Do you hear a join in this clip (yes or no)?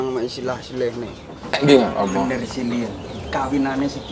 yes